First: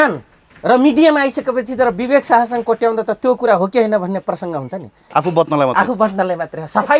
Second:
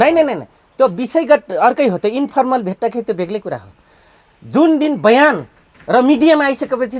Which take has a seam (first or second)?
first